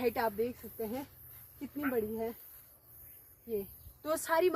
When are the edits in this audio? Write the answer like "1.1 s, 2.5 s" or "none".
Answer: none